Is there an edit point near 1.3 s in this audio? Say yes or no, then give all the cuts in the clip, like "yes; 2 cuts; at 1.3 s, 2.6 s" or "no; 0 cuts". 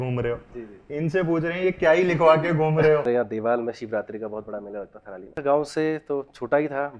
no; 2 cuts; at 3.1 s, 5.4 s